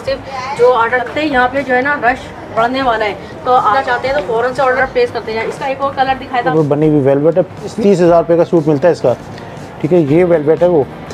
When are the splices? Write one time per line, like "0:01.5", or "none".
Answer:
0:01.0
0:03.7
0:04.8
0:06.5
0:07.7